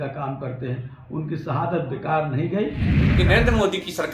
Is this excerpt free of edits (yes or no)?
no